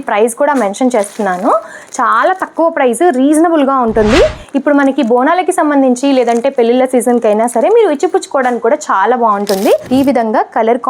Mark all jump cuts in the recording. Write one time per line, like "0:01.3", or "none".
0:09.9